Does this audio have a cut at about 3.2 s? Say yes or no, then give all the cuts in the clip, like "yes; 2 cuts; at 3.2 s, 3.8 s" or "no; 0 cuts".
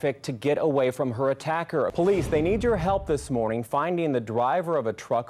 no; 1 cut; at 1.9 s